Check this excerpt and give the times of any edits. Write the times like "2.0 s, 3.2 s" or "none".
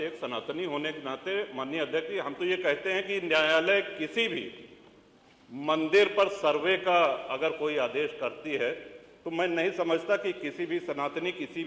none